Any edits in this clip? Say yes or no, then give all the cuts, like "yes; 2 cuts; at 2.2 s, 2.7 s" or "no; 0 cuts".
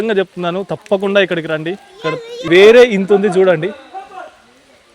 yes; 1 cut; at 2.5 s